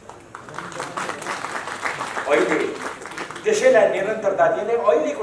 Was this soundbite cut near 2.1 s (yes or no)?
no